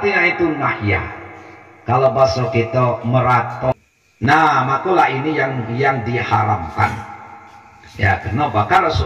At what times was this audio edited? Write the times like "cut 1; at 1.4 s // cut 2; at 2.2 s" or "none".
cut 1; at 3.7 s